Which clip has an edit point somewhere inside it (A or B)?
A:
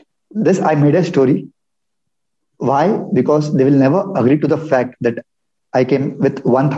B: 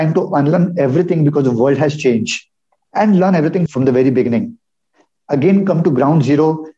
B